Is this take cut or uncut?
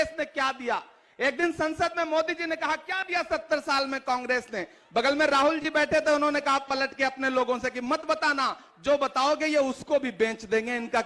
uncut